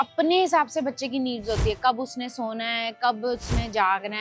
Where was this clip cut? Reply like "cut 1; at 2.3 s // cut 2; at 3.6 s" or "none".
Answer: none